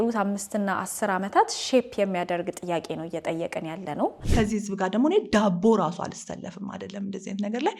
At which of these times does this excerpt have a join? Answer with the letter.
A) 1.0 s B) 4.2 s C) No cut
B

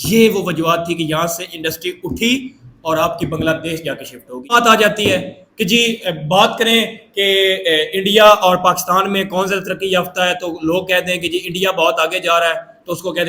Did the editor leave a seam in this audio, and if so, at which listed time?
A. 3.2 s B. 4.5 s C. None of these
B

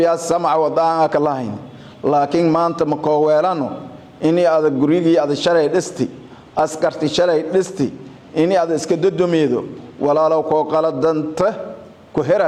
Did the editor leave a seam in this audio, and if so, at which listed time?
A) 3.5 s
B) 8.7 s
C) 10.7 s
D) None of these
D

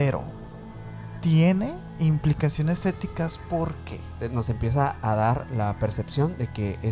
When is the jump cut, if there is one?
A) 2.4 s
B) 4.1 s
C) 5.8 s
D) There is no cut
B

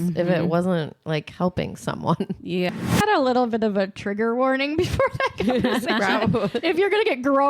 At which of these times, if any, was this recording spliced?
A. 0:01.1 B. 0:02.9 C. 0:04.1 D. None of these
B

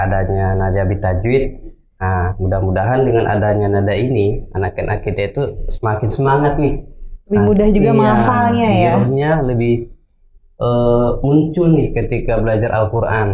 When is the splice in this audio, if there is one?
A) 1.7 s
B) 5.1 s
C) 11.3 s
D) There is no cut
D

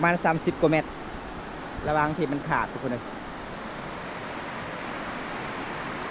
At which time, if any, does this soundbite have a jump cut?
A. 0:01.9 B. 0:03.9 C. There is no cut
C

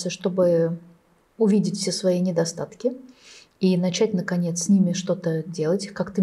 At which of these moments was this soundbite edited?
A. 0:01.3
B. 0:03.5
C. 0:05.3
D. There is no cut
D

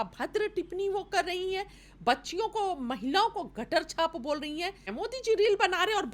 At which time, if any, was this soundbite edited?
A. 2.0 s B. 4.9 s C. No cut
B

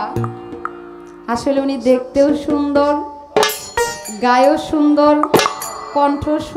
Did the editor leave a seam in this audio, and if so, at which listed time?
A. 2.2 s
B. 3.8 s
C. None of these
C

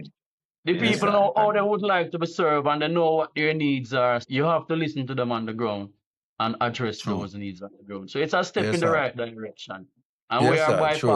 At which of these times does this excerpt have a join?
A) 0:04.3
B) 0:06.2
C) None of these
A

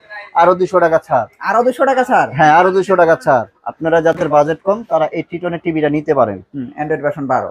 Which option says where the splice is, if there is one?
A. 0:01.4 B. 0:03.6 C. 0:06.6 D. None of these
B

